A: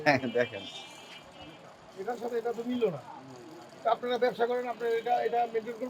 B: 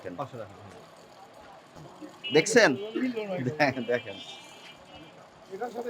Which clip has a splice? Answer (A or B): B